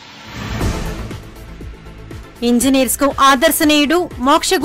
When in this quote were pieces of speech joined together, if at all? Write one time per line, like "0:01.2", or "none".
0:01.0